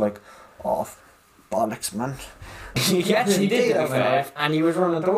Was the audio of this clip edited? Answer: yes; 1 cut; at 2.8 s

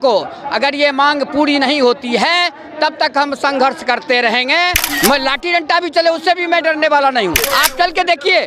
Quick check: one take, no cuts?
no; 2 cuts; at 4.8 s, 7.4 s

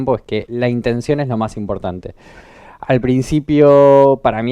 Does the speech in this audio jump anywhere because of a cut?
no; 0 cuts

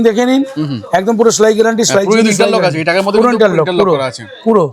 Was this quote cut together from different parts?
no; 0 cuts

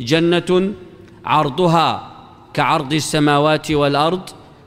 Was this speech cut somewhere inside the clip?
yes; 1 cut; at 3.7 s

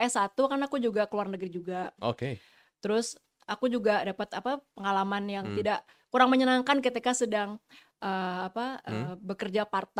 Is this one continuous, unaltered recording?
yes; 0 cuts

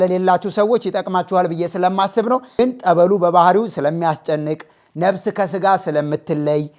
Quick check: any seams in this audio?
yes; 1 cut; at 2.6 s

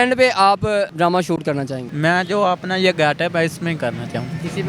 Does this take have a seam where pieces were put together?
yes; 2 cuts; at 0.9 s, 1.8 s

